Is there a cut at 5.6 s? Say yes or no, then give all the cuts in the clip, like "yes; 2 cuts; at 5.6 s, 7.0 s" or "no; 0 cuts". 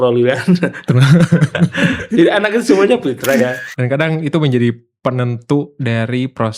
no; 1 cut; at 3.6 s